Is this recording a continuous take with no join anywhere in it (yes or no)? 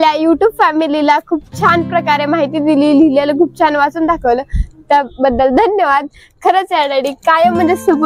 yes